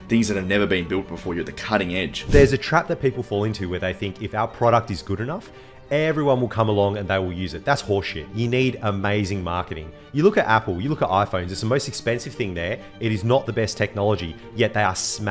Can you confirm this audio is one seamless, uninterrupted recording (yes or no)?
no